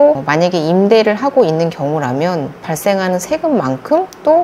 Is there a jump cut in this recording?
no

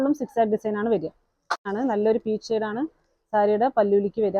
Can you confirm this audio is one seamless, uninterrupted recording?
no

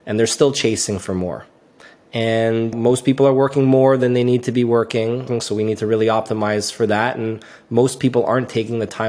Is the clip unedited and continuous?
no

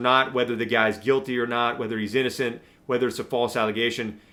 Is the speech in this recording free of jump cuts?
yes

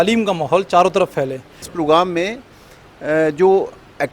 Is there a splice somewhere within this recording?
yes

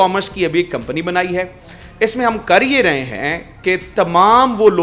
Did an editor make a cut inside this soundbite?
no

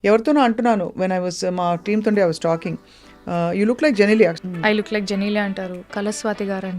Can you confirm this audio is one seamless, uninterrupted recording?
no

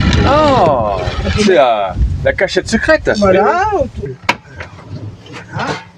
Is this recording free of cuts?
no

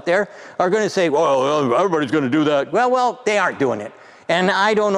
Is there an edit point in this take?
no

